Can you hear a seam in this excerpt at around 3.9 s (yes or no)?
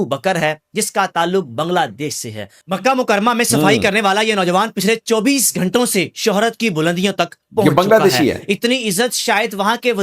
no